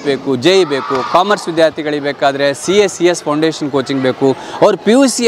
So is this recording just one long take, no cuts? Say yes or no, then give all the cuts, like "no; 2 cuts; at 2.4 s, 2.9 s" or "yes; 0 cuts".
yes; 0 cuts